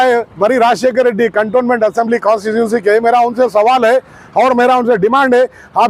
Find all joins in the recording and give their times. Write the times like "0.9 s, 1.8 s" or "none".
none